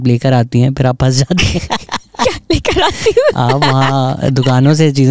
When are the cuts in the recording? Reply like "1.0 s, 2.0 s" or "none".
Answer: none